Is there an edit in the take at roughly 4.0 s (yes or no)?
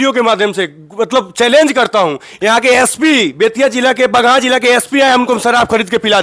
no